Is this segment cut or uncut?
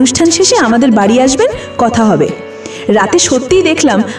cut